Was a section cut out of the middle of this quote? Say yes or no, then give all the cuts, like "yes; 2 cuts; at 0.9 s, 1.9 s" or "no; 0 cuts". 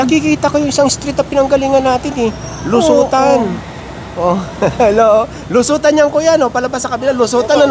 no; 0 cuts